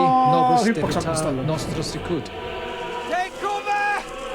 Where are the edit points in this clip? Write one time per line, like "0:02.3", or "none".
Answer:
0:01.2